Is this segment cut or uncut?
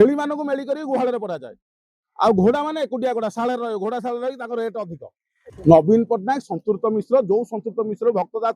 cut